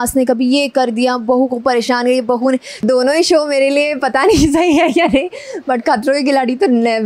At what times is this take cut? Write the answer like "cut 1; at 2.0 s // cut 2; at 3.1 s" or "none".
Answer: cut 1; at 2.8 s